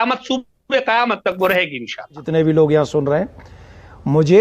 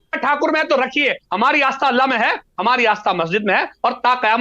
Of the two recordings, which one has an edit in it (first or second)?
first